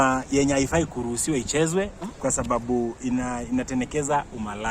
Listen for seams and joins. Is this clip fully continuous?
yes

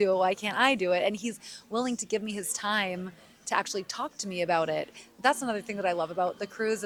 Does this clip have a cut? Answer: no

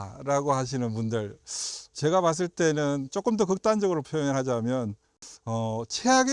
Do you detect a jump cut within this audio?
no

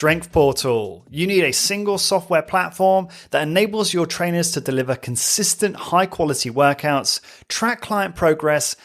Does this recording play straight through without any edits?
yes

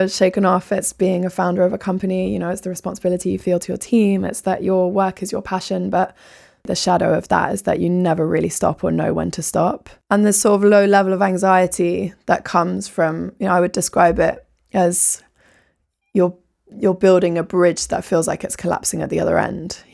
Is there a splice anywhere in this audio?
no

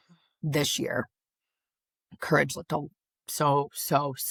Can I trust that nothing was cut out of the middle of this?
yes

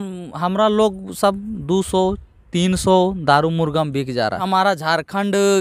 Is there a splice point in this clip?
yes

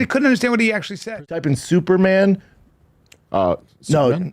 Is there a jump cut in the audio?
yes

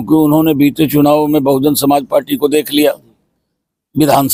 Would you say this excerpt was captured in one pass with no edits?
yes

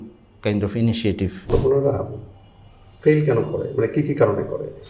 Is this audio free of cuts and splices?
no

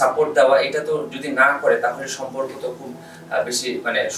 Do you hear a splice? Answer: no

